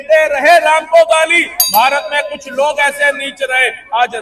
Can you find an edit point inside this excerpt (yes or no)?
no